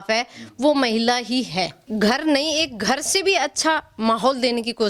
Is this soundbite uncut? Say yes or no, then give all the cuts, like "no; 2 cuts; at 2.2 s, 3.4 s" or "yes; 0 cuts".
no; 1 cut; at 1.8 s